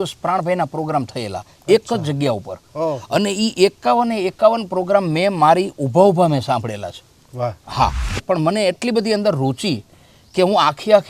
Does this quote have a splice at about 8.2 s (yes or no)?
yes